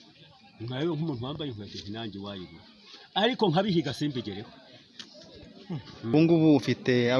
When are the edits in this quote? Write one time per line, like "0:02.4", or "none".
0:06.1